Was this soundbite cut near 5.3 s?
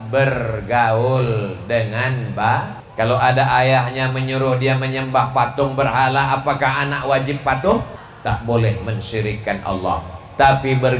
no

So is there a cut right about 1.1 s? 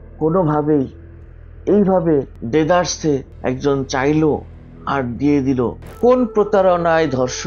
no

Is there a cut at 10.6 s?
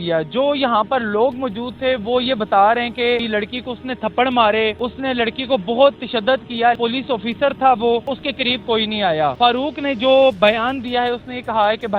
no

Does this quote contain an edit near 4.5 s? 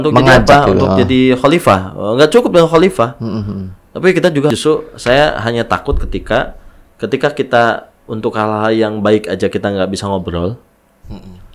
yes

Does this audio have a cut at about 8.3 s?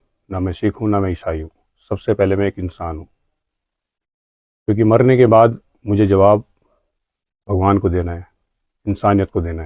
no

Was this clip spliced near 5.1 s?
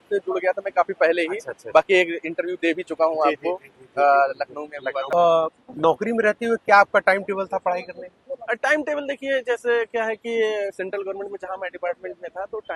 yes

